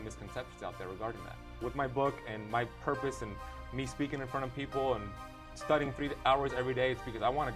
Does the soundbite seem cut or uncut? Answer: cut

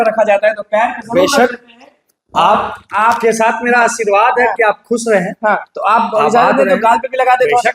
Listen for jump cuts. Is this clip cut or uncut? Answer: uncut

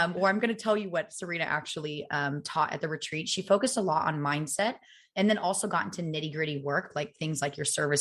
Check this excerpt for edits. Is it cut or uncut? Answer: uncut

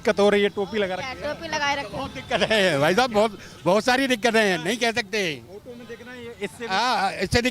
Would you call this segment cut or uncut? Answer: uncut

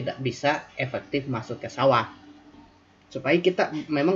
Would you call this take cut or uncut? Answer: cut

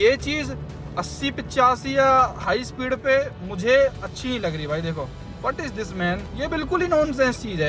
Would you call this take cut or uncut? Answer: cut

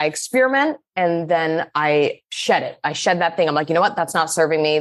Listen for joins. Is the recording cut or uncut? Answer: uncut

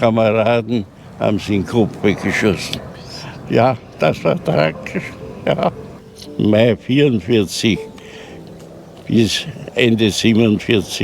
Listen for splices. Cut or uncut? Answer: cut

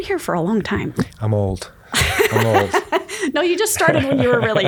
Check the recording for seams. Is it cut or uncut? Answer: uncut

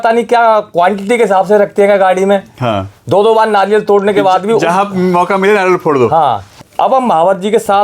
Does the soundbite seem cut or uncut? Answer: cut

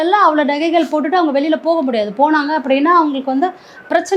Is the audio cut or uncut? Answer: uncut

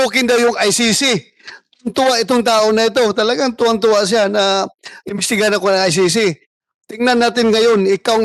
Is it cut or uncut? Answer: uncut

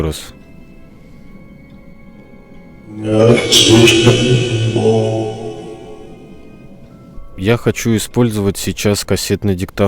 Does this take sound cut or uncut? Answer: cut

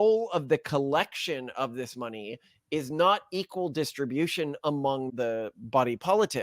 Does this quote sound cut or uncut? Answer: cut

